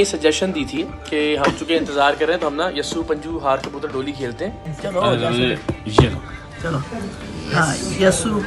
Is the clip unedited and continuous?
no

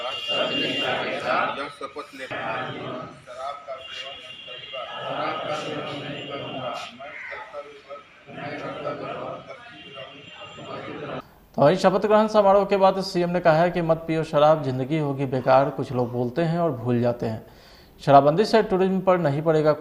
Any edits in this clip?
yes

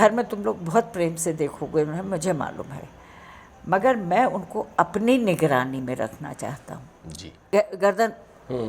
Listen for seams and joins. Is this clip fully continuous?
no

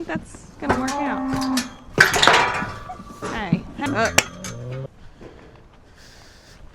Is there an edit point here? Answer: no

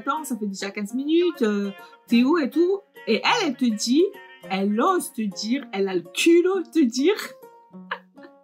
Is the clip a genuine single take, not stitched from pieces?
yes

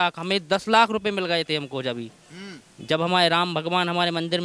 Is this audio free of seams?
yes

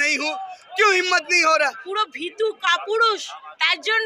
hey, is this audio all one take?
no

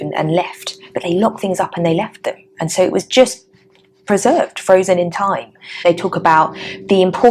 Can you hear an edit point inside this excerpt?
yes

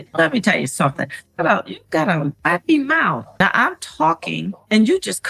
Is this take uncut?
no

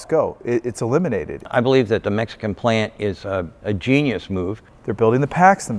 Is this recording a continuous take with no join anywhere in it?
no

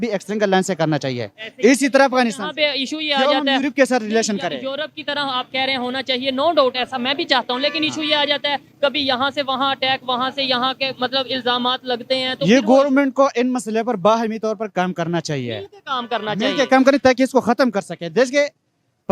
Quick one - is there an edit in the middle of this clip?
no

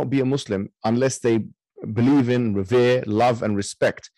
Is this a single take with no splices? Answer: yes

